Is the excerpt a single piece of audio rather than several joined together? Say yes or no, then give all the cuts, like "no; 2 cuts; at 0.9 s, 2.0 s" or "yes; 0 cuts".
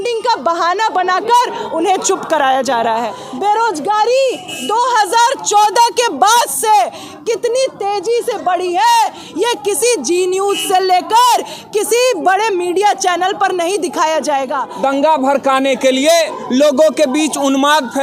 no; 2 cuts; at 3.2 s, 14.7 s